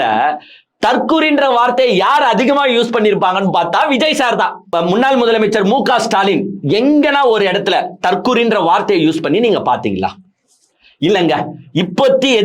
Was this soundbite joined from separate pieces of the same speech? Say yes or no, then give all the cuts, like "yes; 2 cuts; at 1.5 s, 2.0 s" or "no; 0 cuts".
yes; 1 cut; at 4.7 s